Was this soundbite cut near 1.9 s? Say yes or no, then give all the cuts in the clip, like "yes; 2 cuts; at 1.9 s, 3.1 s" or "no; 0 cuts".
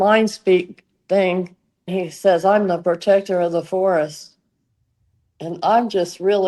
yes; 1 cut; at 1.9 s